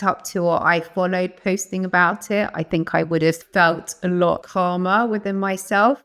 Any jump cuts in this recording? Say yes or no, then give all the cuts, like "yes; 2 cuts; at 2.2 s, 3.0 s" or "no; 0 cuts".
yes; 2 cuts; at 3.4 s, 4.5 s